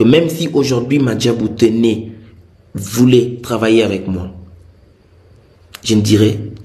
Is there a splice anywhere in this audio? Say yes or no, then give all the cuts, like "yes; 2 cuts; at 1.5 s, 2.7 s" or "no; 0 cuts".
no; 0 cuts